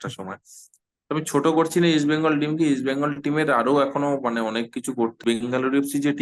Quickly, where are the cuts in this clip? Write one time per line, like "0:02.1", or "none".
0:05.2